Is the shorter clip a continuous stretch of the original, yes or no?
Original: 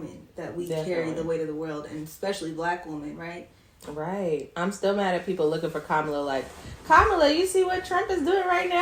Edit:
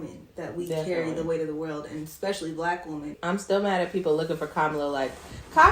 no